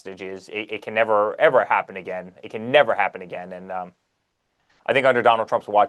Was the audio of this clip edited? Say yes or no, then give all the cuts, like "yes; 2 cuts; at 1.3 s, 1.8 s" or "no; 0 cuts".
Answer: no; 0 cuts